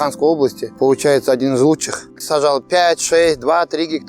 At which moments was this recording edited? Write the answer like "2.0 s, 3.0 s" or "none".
2.2 s